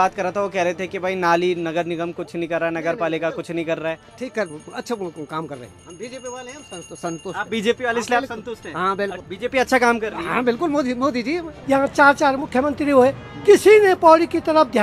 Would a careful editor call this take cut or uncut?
cut